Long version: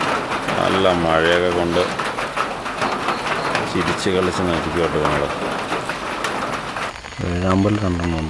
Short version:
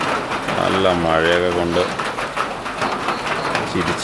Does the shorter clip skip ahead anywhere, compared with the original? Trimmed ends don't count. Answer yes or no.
no